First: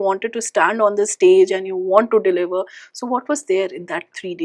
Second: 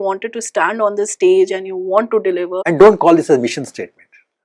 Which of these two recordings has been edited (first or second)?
second